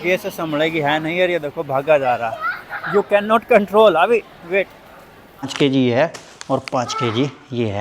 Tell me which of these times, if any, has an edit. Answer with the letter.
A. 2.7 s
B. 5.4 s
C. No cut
B